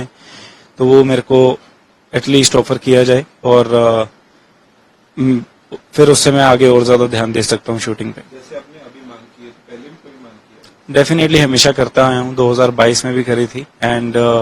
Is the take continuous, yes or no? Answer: yes